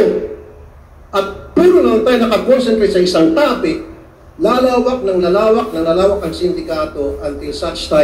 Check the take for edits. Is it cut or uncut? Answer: uncut